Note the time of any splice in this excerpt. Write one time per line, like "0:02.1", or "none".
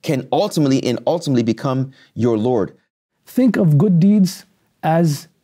0:03.0